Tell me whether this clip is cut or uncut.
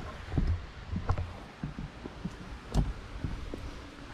uncut